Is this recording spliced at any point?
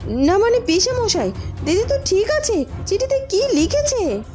no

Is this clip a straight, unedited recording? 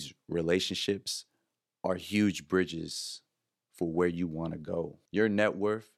no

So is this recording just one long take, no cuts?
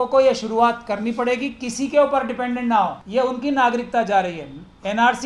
no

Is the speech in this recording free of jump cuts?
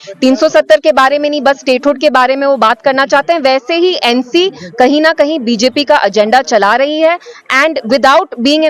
yes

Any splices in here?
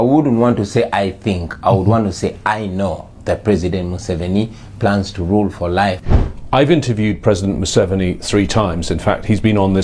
yes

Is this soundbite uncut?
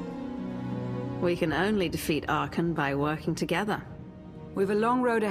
yes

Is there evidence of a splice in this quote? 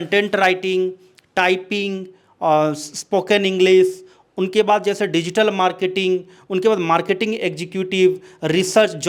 no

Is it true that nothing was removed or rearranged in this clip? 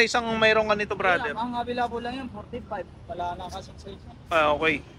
yes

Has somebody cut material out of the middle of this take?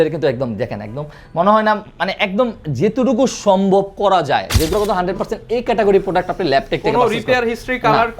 yes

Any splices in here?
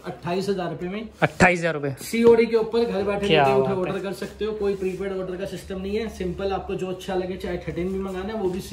no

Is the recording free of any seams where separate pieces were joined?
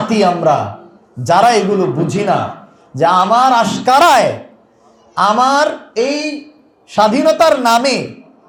yes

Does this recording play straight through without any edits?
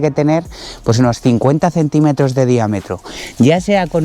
yes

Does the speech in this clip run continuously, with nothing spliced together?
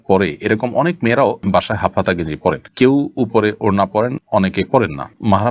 yes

